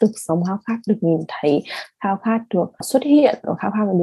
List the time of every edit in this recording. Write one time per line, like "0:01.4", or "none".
0:02.9